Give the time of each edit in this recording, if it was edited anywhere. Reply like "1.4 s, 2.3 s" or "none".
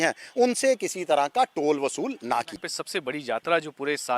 2.6 s